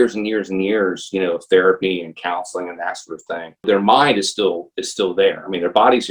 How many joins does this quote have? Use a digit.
1